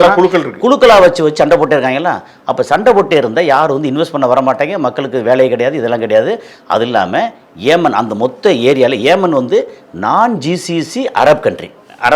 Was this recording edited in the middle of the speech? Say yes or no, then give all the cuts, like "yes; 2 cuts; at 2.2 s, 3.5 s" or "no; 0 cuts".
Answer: no; 0 cuts